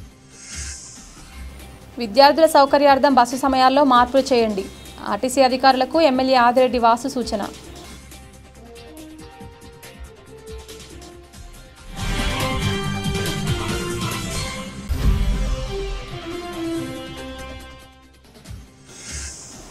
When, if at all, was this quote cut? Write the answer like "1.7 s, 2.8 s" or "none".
1.2 s